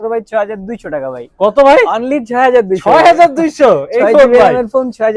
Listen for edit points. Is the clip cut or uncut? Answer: uncut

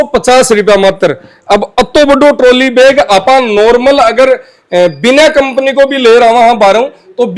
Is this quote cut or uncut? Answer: uncut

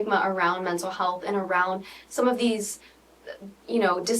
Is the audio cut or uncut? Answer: uncut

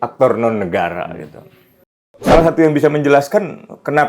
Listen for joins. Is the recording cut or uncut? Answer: cut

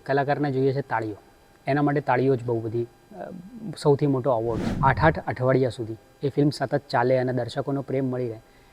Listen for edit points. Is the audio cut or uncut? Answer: cut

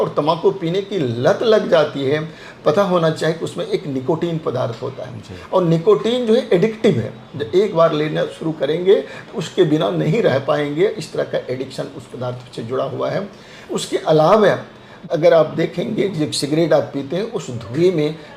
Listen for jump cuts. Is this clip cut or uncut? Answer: uncut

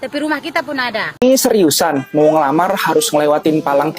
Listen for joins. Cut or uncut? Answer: cut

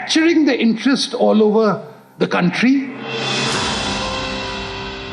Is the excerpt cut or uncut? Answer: cut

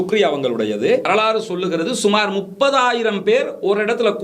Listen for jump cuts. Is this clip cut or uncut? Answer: cut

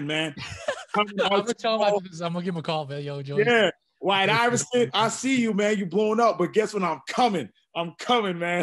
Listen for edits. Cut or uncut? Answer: uncut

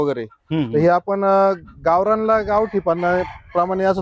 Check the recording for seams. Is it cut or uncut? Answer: uncut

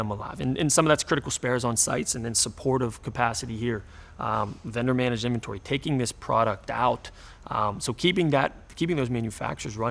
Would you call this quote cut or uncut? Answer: uncut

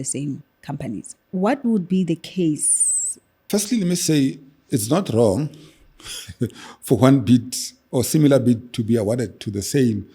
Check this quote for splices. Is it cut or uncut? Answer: cut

